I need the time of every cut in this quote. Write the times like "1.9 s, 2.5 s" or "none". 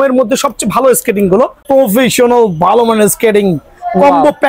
1.6 s